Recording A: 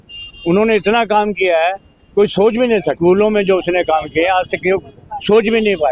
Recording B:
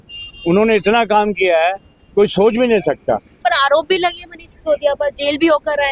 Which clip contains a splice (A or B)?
A